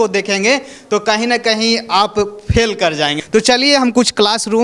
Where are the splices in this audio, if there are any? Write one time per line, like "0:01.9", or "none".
none

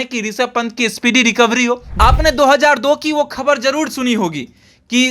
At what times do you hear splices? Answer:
0:01.9

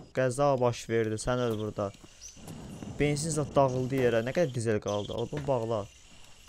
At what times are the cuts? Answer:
none

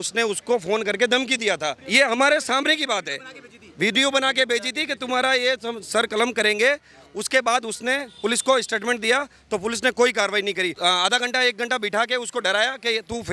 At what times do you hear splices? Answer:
0:01.8
0:10.7

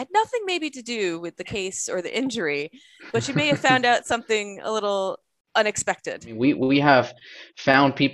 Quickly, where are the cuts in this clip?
0:05.3
0:06.3

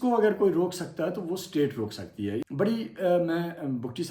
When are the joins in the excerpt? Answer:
0:02.5

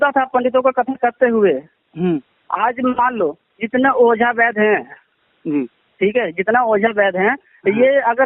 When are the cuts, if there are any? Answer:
none

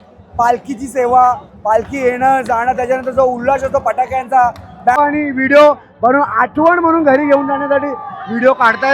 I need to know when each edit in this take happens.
0:05.0

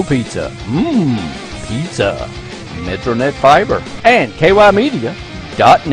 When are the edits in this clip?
0:03.9

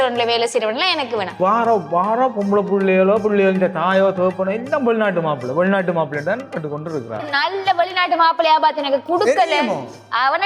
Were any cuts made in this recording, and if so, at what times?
0:01.4
0:07.2

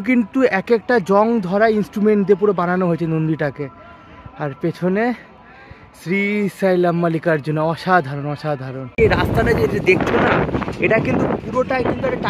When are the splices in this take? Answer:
0:08.8

